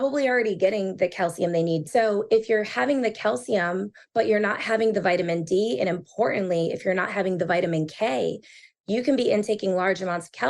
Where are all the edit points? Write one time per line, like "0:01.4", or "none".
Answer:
0:01.9
0:08.7